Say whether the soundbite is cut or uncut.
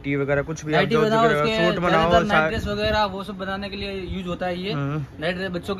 uncut